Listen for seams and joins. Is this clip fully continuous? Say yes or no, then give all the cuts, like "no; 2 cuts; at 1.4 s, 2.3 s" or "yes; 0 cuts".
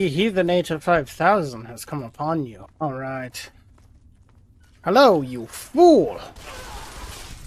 yes; 0 cuts